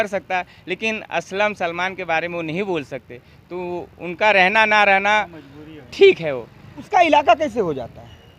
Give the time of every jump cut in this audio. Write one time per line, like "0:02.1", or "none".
0:06.9